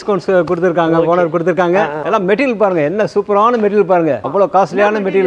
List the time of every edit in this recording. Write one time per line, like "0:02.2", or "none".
0:02.0
0:04.2

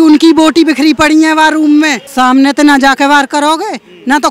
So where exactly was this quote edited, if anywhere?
0:02.0

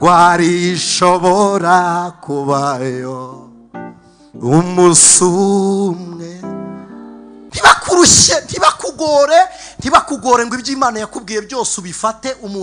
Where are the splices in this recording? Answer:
0:07.4

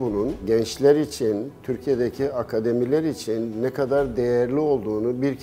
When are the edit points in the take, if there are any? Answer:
none

